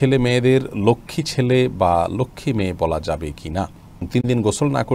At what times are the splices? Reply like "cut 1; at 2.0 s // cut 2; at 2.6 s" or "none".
cut 1; at 4.0 s